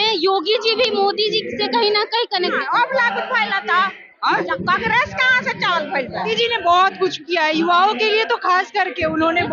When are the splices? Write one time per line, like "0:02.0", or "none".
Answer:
0:02.6
0:06.3